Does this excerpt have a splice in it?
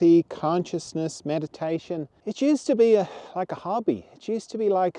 yes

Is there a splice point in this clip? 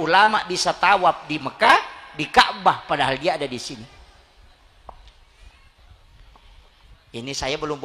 no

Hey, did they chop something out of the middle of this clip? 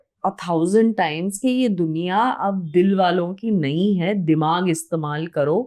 no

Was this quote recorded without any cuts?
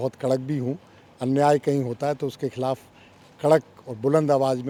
yes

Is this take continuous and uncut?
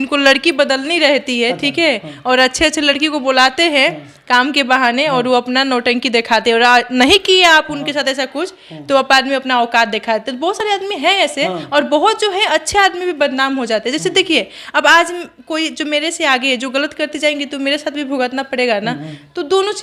yes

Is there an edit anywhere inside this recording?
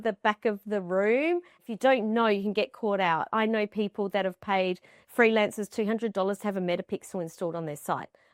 yes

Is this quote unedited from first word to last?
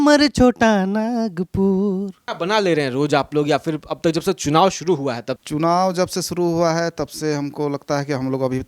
no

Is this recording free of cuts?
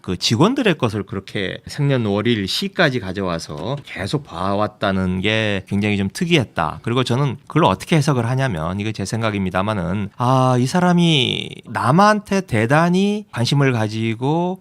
yes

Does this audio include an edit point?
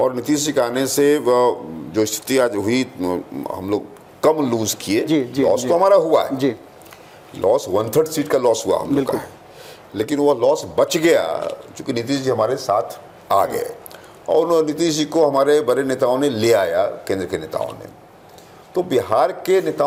no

